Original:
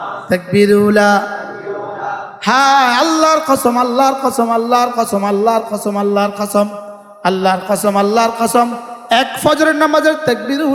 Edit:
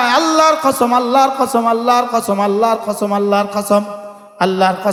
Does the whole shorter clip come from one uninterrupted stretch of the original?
yes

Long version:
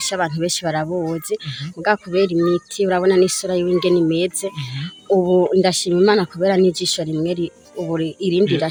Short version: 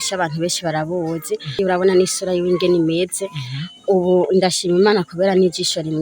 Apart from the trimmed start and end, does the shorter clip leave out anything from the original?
yes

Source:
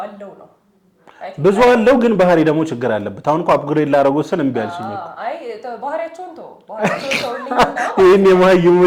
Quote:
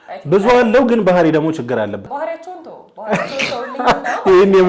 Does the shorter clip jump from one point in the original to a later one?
yes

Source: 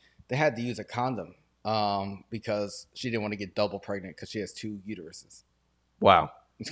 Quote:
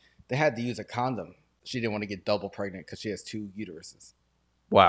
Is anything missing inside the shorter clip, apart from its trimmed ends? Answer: yes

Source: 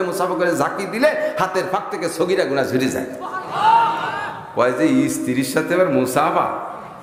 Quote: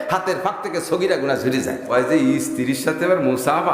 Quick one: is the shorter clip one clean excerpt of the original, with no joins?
no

